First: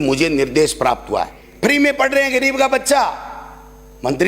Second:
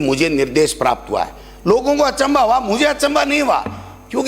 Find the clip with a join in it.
first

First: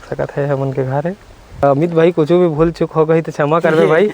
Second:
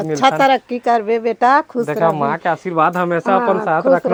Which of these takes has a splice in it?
first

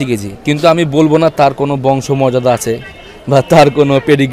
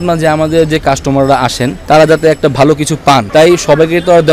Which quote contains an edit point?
second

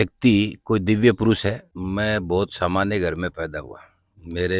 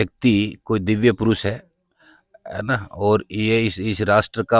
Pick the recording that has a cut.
first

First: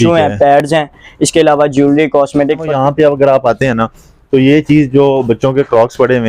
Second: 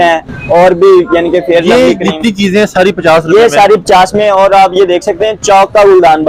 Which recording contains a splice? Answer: first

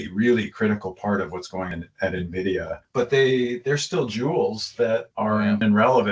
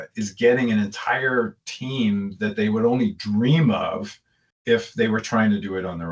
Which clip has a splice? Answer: first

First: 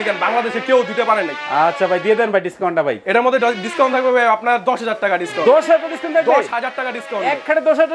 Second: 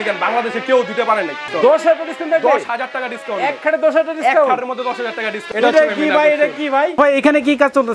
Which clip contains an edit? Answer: second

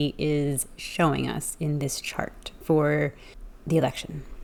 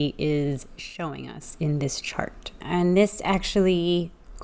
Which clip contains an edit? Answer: second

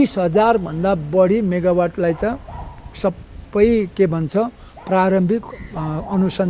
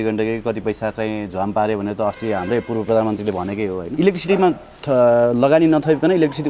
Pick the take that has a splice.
second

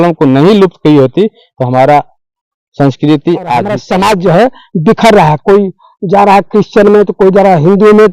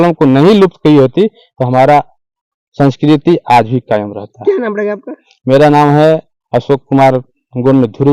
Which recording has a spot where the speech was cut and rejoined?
first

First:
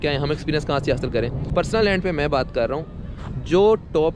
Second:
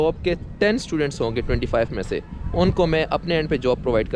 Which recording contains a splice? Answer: first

